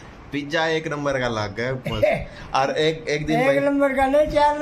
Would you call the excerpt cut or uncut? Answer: uncut